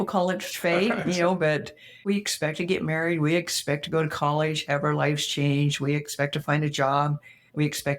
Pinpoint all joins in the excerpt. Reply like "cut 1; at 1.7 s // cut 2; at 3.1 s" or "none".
cut 1; at 2.0 s

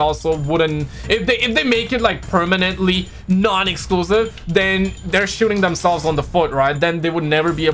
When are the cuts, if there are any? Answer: none

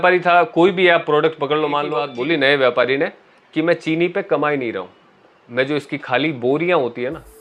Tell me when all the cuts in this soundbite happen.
cut 1; at 2.1 s

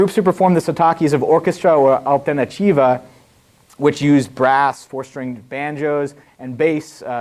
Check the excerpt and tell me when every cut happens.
none

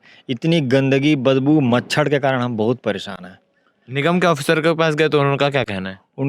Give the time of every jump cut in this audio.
none

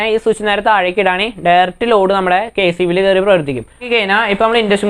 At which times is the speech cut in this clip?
cut 1; at 3.9 s

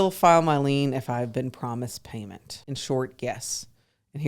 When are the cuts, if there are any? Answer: cut 1; at 2.5 s

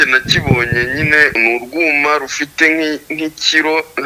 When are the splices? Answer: cut 1; at 1.4 s

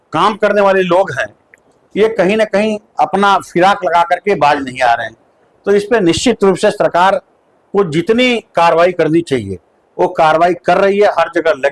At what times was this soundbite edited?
none

